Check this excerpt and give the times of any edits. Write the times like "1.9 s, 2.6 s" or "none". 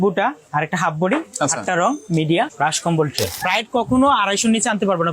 3.3 s